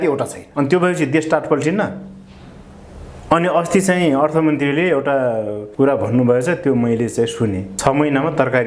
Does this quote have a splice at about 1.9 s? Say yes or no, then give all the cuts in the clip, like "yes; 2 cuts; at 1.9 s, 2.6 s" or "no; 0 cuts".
no; 0 cuts